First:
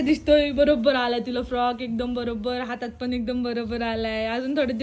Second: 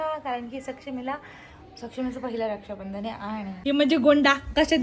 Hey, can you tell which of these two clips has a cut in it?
second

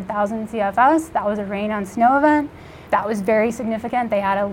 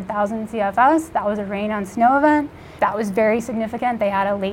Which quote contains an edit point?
second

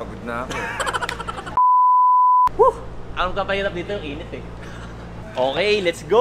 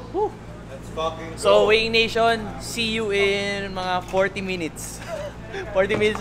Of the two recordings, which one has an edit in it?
first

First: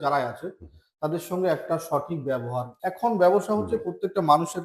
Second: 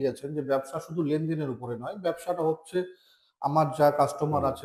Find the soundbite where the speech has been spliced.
first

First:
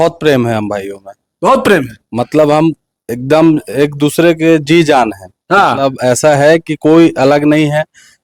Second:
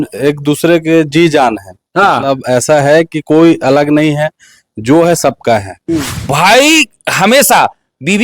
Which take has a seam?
second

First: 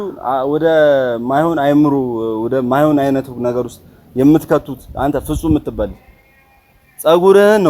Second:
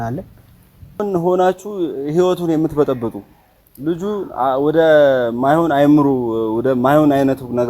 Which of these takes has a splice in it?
second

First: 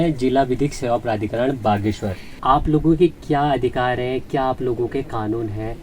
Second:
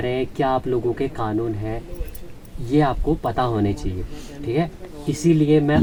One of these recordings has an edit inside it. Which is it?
first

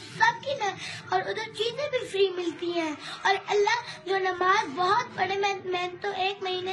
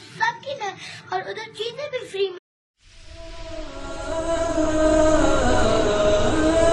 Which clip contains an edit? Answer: first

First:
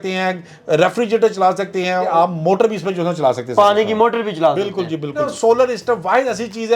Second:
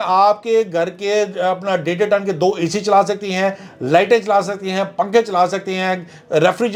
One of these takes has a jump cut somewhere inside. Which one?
first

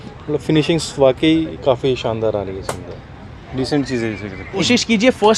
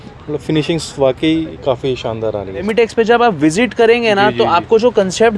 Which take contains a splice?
second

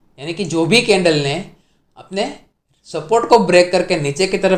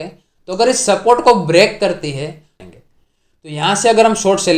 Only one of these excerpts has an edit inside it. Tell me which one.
second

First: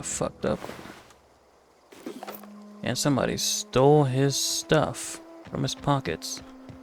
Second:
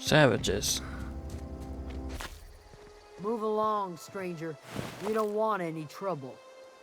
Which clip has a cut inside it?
second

